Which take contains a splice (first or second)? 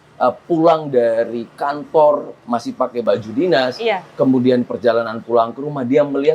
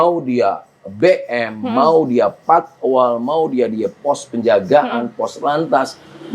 first